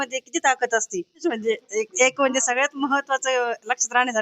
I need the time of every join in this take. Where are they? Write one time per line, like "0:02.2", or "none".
0:01.2